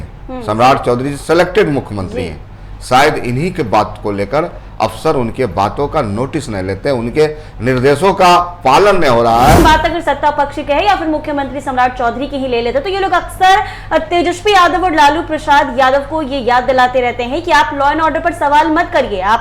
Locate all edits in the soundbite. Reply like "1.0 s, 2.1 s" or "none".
9.6 s